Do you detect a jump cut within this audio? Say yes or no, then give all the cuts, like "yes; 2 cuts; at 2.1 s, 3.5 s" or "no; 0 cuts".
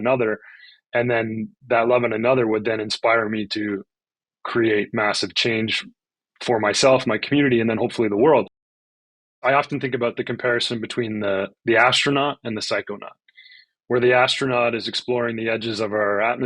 yes; 1 cut; at 9.1 s